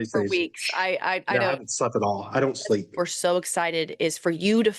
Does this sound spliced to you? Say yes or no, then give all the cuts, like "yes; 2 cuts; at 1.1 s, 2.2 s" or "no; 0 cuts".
yes; 1 cut; at 2.9 s